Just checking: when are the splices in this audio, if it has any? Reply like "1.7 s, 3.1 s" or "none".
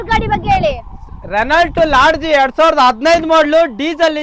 none